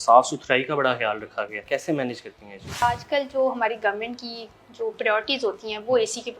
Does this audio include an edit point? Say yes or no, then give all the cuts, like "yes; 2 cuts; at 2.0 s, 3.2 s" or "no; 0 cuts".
yes; 2 cuts; at 1.6 s, 2.8 s